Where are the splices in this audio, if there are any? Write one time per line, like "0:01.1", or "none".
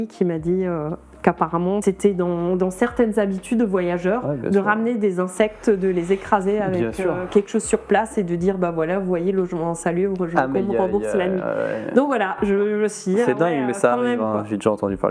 none